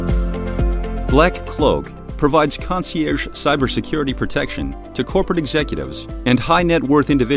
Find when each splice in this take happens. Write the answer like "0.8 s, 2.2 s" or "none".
1.1 s